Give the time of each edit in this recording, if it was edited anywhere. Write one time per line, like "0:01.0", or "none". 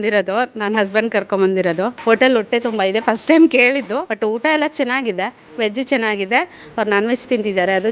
0:01.9
0:04.1
0:05.4